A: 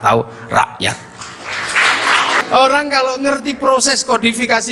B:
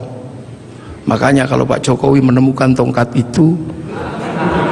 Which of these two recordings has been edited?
A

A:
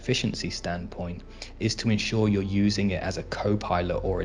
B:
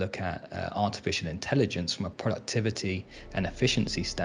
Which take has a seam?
B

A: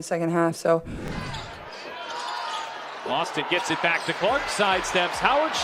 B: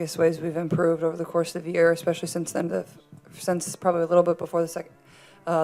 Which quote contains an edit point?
A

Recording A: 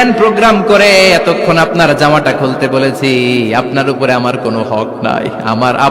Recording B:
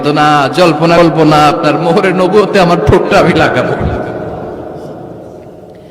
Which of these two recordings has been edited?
B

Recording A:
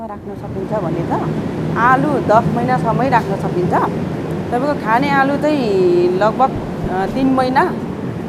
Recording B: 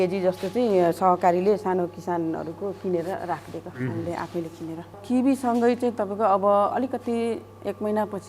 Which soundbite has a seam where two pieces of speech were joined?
B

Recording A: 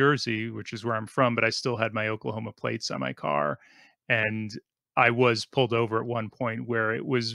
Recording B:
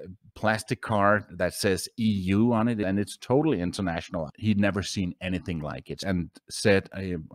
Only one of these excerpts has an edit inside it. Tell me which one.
B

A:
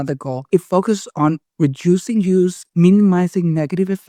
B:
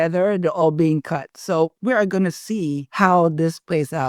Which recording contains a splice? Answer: B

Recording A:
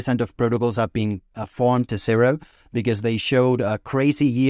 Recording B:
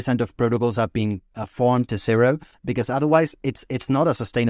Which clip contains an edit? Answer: B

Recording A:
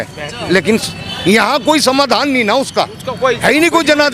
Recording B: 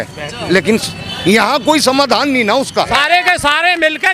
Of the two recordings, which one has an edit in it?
B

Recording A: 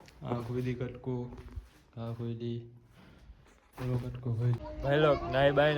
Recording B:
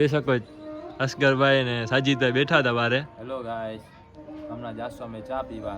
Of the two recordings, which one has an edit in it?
A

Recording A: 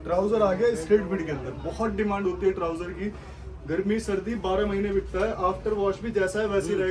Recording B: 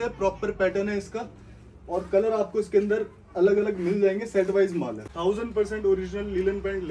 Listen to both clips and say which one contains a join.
B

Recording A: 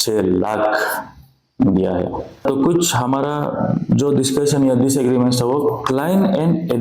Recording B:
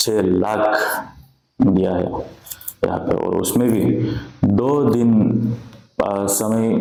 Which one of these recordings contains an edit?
A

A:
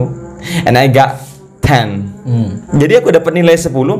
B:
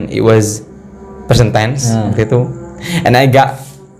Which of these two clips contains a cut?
A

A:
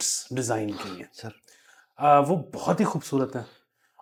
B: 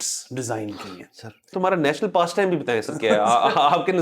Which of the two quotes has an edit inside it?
B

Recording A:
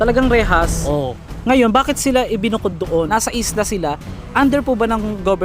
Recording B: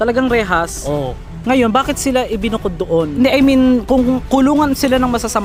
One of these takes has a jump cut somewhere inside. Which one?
A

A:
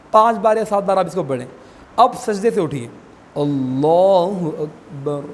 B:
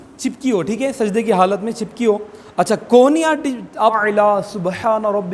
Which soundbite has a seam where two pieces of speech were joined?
B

